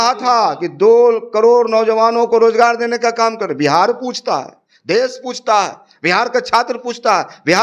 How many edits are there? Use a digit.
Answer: 0